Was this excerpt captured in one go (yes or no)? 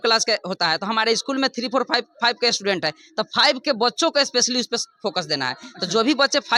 yes